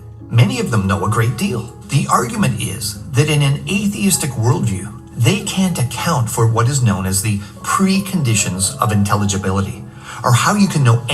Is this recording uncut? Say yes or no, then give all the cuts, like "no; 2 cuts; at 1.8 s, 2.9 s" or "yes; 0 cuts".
no; 1 cut; at 1.7 s